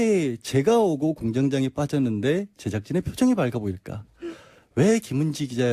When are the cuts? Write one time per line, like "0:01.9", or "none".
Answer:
0:02.1